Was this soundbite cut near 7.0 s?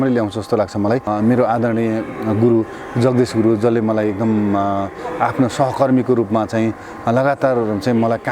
no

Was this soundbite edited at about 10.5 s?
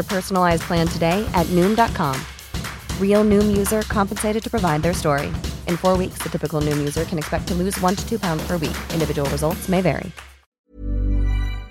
yes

